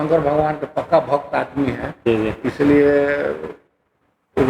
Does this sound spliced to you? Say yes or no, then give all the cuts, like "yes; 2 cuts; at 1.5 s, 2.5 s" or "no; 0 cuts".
no; 0 cuts